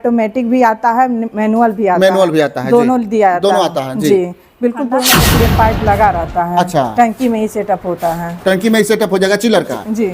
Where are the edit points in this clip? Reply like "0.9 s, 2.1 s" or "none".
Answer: 5.1 s